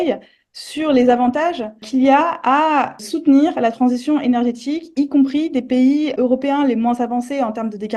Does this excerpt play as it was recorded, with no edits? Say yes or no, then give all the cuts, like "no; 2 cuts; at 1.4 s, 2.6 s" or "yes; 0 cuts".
no; 3 cuts; at 1.8 s, 3.0 s, 6.1 s